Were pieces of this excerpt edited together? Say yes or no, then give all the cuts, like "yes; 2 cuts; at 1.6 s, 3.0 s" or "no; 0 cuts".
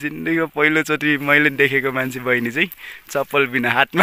no; 0 cuts